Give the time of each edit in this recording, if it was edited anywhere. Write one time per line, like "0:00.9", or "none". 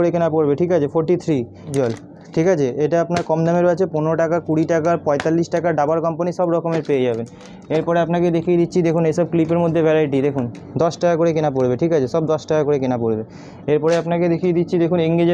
none